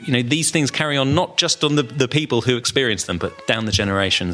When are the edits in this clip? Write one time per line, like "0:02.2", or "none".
0:03.4